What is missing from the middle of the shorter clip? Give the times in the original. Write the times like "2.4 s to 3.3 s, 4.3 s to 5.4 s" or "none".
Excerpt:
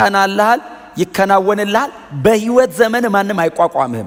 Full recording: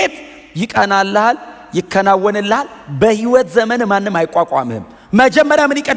none